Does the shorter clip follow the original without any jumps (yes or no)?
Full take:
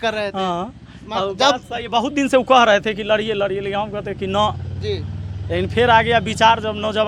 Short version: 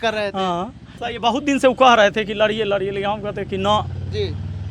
no